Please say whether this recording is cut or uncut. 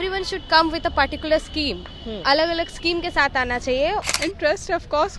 cut